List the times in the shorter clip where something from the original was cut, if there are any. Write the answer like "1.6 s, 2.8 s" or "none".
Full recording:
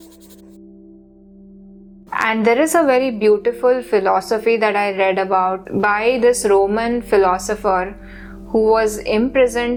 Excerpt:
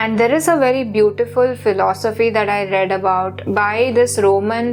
none